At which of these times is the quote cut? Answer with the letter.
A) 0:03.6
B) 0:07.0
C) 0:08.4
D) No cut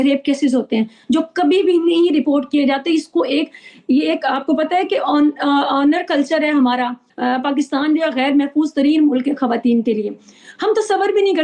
B